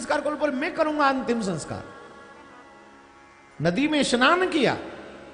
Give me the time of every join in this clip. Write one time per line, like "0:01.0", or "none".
none